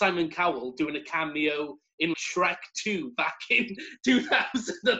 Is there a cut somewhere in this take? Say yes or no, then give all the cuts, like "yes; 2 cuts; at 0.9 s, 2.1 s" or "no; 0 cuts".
yes; 1 cut; at 2.1 s